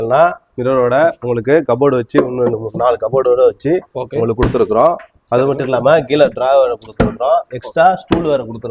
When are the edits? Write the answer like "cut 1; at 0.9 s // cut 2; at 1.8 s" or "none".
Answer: none